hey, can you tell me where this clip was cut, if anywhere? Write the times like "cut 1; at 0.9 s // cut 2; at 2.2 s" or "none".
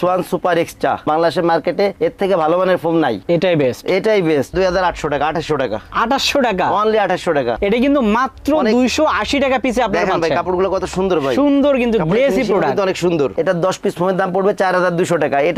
cut 1; at 4.5 s // cut 2; at 7.5 s // cut 3; at 13.3 s